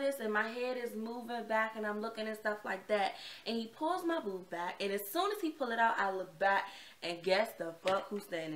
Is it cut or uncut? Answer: uncut